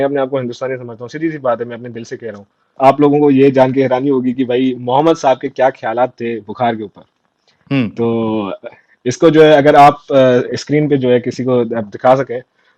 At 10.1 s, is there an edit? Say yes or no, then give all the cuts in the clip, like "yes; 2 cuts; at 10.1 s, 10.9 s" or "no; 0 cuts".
no; 1 cut; at 2.7 s